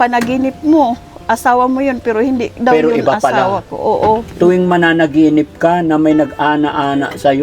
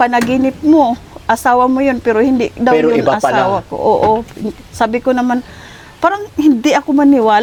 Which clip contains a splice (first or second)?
first